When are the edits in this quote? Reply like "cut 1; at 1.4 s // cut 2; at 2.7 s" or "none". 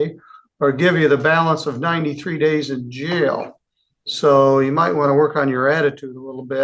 none